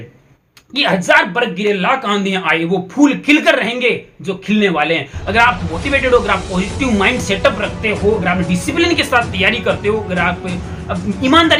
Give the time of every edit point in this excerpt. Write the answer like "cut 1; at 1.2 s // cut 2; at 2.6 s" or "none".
none